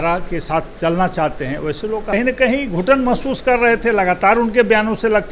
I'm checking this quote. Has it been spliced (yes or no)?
yes